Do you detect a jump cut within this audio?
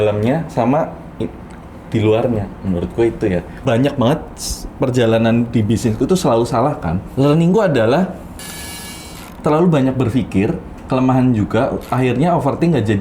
yes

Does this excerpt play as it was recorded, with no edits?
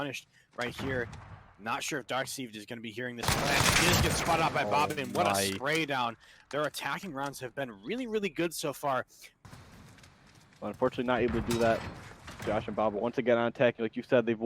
no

